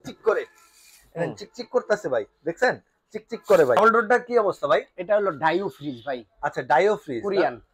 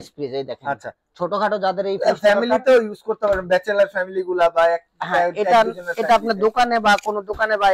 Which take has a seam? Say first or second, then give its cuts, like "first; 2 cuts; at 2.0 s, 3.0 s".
first; 1 cut; at 3.8 s